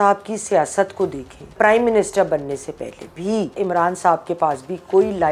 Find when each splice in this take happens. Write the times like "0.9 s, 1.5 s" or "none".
1.5 s, 3.5 s